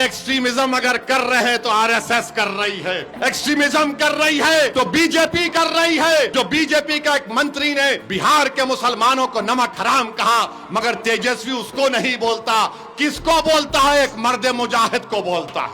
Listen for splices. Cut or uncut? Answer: cut